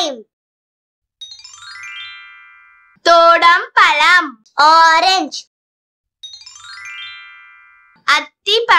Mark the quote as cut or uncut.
uncut